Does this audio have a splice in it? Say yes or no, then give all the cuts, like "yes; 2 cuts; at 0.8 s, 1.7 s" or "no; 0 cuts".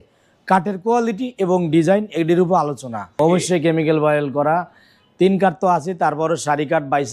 yes; 1 cut; at 3.1 s